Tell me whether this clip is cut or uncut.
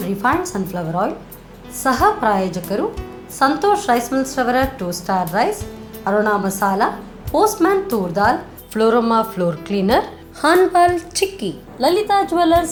uncut